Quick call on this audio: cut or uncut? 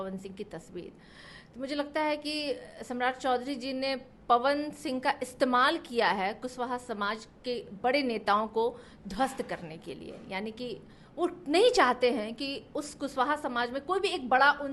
uncut